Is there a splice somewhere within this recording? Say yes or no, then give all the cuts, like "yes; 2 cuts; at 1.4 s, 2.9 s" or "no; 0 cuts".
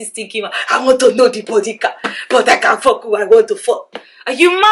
no; 0 cuts